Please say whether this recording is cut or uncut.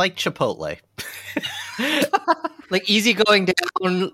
cut